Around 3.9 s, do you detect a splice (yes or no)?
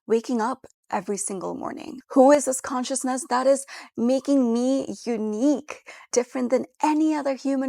no